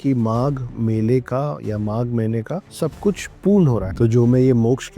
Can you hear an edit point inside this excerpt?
yes; 2 cuts; at 2.7 s, 3.9 s

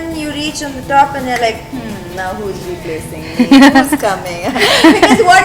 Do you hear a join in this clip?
no; 0 cuts

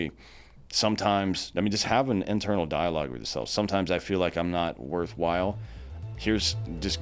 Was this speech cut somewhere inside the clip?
no; 0 cuts

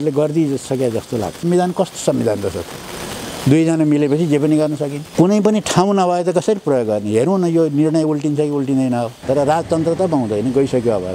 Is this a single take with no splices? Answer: no; 3 cuts; at 1.4 s, 5.0 s, 9.2 s

